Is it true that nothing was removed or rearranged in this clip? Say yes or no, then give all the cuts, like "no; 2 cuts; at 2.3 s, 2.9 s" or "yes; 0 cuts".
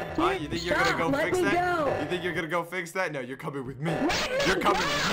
yes; 0 cuts